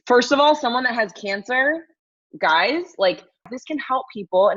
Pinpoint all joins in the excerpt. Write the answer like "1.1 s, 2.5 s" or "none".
3.5 s